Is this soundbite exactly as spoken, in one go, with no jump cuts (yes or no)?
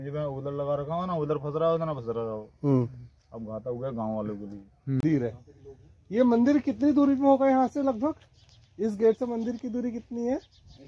no